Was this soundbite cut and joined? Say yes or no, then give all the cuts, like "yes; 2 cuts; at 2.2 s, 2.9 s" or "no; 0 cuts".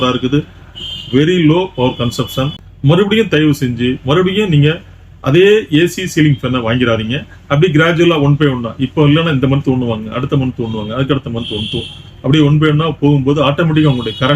yes; 1 cut; at 2.7 s